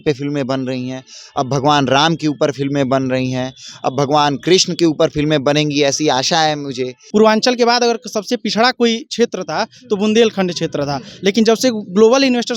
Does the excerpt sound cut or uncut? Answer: cut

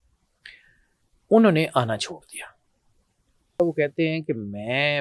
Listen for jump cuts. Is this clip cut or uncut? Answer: cut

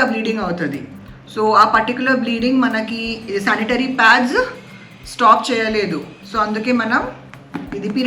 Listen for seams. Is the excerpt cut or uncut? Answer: uncut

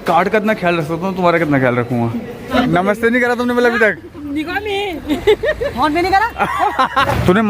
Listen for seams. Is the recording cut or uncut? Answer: cut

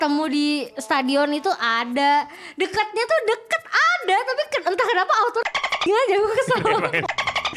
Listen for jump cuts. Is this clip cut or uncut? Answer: uncut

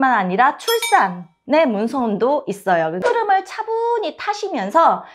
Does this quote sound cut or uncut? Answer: cut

